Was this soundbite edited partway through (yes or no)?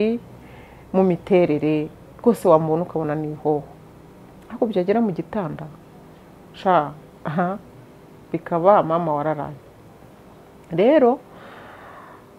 no